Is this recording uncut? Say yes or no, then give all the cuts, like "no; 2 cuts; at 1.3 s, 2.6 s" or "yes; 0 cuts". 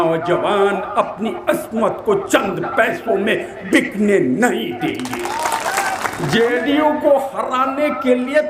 no; 1 cut; at 6.1 s